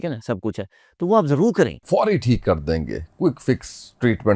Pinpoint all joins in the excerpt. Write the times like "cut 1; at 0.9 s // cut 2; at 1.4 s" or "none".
cut 1; at 1.8 s